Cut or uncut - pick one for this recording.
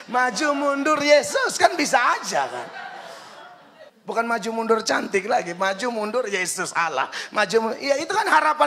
cut